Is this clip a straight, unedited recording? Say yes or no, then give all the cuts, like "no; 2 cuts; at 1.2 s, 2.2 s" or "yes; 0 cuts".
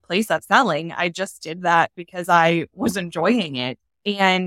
yes; 0 cuts